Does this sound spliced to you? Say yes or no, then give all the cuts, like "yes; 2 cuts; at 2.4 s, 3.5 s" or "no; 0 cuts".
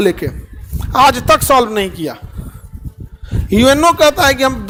no; 0 cuts